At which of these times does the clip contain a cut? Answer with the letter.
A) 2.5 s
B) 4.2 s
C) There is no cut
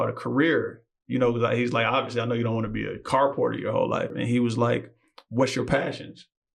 B